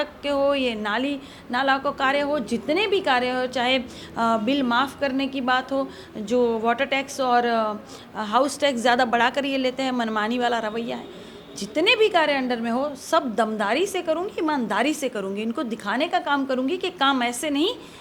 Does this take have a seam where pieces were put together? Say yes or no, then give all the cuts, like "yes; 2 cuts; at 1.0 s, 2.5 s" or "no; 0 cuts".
no; 0 cuts